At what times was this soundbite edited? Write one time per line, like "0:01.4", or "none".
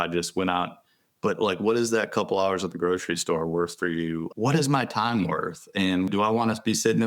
0:04.3
0:06.1